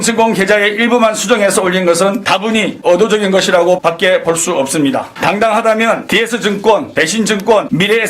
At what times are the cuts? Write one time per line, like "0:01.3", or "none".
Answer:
0:03.8